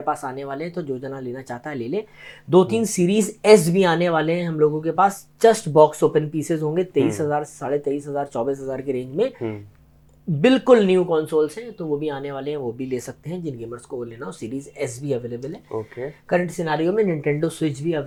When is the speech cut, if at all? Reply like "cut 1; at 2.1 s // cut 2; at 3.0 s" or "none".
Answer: none

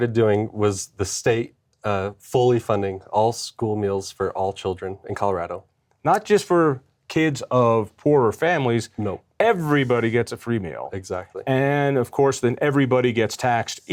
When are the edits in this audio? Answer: none

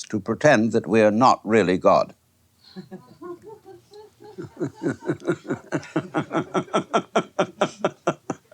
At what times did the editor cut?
cut 1; at 3.6 s

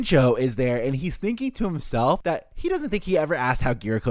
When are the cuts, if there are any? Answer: cut 1; at 2.2 s

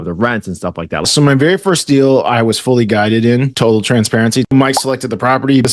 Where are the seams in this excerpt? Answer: cut 1; at 1.0 s // cut 2; at 3.5 s // cut 3; at 4.5 s

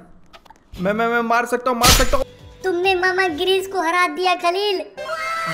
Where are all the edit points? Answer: cut 1; at 2.2 s

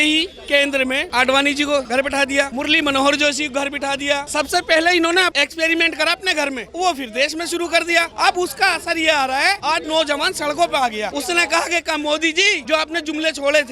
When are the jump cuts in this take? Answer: cut 1; at 1.0 s // cut 2; at 2.0 s // cut 3; at 4.3 s // cut 4; at 5.3 s // cut 5; at 6.6 s // cut 6; at 8.1 s // cut 7; at 9.6 s // cut 8; at 11.1 s // cut 9; at 12.6 s

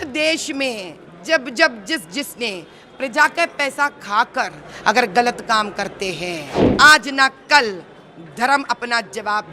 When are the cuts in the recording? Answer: cut 1; at 6.6 s

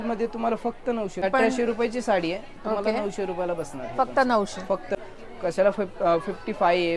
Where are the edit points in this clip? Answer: cut 1; at 1.2 s // cut 2; at 4.9 s

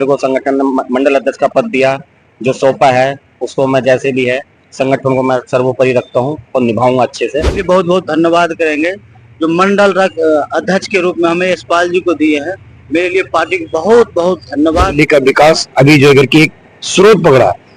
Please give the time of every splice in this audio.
cut 1; at 7.6 s // cut 2; at 14.9 s

